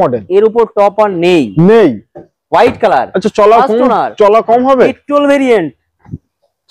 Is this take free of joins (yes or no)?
yes